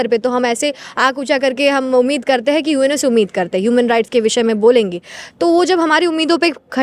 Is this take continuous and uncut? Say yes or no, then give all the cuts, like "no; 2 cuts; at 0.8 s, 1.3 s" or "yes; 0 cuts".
yes; 0 cuts